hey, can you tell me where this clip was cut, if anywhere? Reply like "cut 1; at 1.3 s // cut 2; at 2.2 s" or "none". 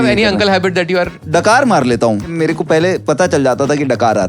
cut 1; at 1.2 s // cut 2; at 2.3 s